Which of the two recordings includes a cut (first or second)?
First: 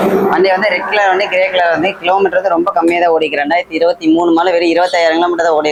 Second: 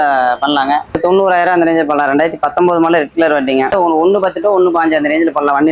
second